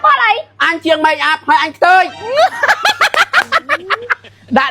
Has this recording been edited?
yes; 1 cut; at 2.3 s

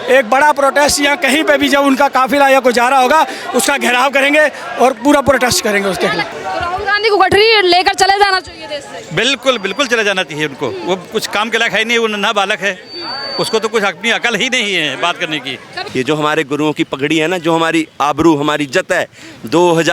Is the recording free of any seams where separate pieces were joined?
no; 2 cuts; at 6.3 s, 15.8 s

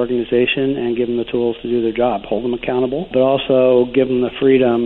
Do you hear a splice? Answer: yes; 1 cut; at 3.1 s

